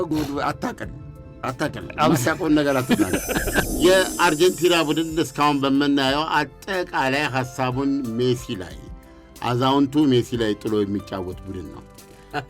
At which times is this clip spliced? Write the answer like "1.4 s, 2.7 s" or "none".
3.7 s